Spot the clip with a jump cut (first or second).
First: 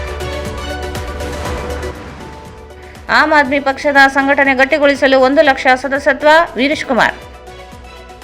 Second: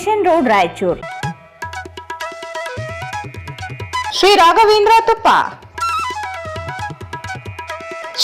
first